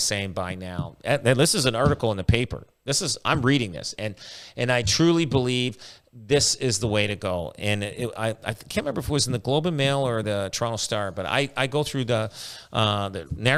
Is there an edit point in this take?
no; 0 cuts

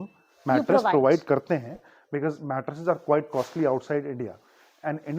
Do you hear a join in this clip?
no; 0 cuts

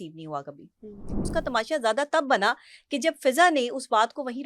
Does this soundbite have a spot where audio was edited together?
yes; 1 cut; at 1.3 s

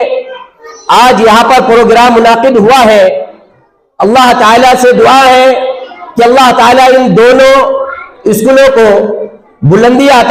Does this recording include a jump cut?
no; 0 cuts

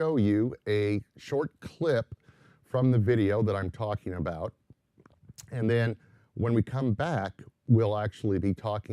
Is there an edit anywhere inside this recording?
yes; 1 cut; at 2.2 s

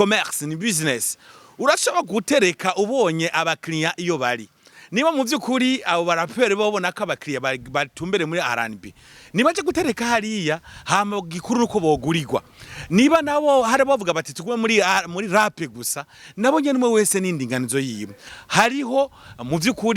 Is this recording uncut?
no; 1 cut; at 18.3 s

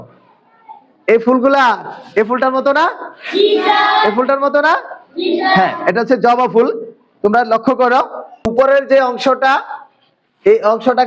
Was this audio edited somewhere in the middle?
yes; 1 cut; at 8.5 s

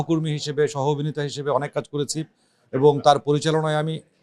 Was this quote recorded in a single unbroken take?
yes; 0 cuts

